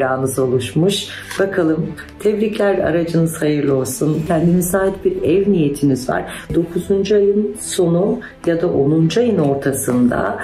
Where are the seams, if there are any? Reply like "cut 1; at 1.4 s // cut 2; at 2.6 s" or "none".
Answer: cut 1; at 4.2 s // cut 2; at 6.5 s